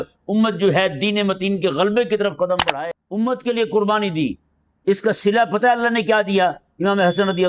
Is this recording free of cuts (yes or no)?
no